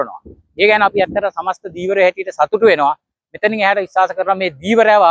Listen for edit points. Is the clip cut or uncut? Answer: uncut